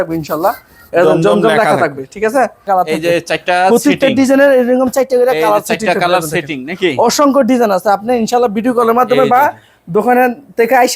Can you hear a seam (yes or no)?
yes